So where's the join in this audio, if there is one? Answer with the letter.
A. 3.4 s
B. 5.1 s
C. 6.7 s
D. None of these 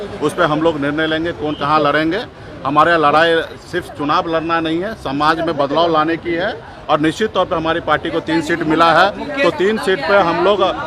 D